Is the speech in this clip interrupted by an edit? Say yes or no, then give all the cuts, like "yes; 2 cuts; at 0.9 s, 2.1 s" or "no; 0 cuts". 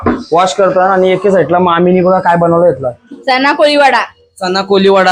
yes; 1 cut; at 3.1 s